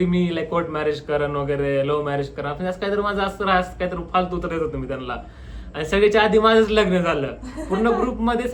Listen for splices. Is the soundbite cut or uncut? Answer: uncut